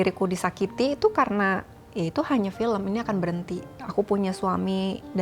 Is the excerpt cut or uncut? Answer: cut